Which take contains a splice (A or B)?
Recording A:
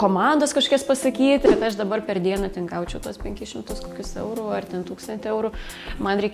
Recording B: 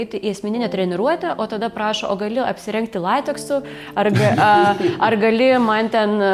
A